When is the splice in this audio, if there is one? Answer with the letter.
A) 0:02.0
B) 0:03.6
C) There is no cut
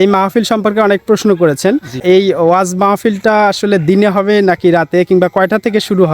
A